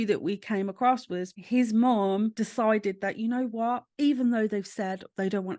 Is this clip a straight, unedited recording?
no; 3 cuts; at 1.4 s, 2.3 s, 3.9 s

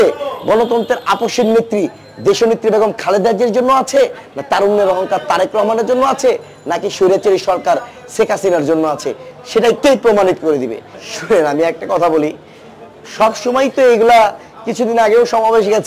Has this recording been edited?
no; 0 cuts

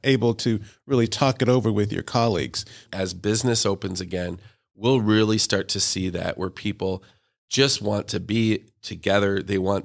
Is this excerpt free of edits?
no; 1 cut; at 2.8 s

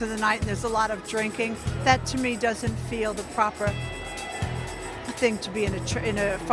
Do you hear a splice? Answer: no; 0 cuts

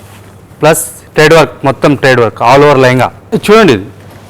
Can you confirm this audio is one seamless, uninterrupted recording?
no; 1 cut; at 3.2 s

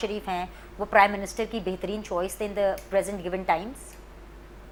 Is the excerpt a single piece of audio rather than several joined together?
yes; 0 cuts

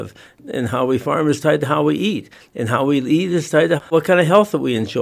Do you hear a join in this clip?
yes; 1 cut; at 3.8 s

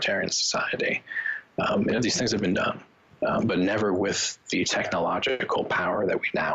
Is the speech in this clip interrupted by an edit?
no; 0 cuts

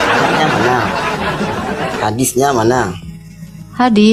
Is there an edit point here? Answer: no; 0 cuts

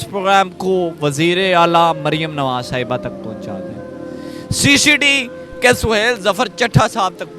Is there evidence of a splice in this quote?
no; 0 cuts

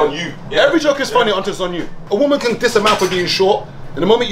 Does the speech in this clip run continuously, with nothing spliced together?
no; 1 cut; at 1.9 s

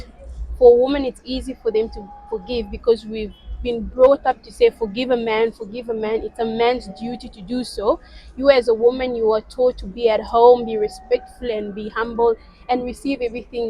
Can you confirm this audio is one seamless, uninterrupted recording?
yes; 0 cuts

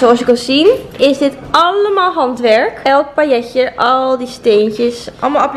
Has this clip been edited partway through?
no; 0 cuts

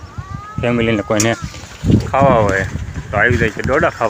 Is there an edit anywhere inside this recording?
no; 0 cuts

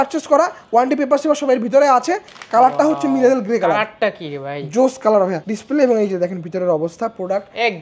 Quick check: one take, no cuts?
no; 2 cuts; at 2.3 s, 5.5 s

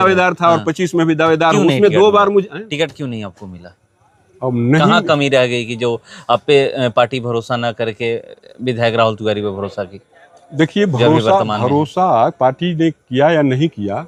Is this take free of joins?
yes; 0 cuts

